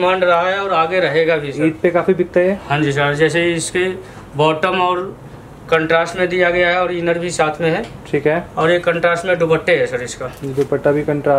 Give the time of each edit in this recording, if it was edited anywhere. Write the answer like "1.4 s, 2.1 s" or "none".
none